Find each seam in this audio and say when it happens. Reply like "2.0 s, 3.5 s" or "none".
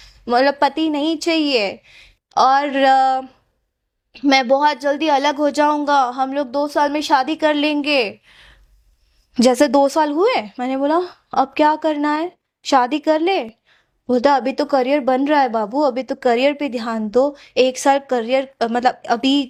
none

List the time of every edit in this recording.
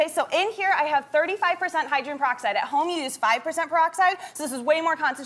1.3 s

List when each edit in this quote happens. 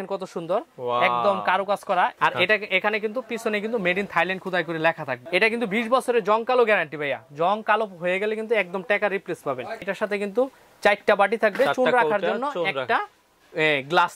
2.1 s, 5.1 s, 9.8 s

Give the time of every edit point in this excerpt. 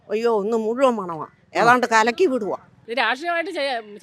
2.7 s

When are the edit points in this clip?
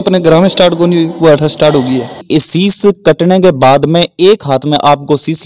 2.2 s

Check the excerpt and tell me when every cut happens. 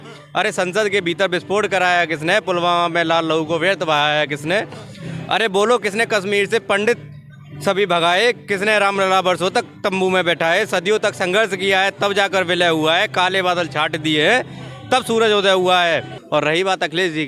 16.2 s

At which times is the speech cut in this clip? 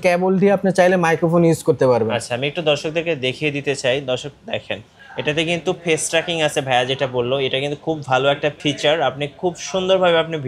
8.6 s

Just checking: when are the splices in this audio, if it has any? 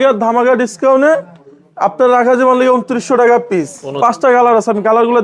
3.8 s

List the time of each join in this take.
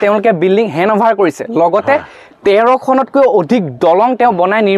none

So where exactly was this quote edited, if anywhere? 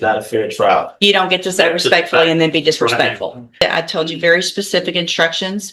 3.6 s

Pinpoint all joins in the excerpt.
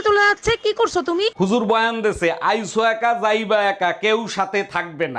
none

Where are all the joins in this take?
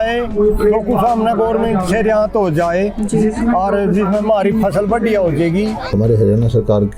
5.9 s

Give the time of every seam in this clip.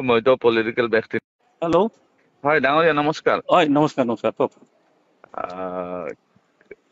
1.3 s

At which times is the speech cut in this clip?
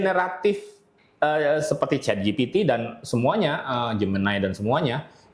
none

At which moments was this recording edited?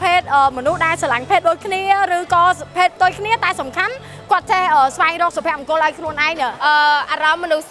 6.5 s

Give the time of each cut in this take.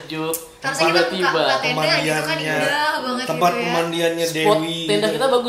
none

